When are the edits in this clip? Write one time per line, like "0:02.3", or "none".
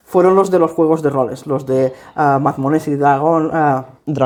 none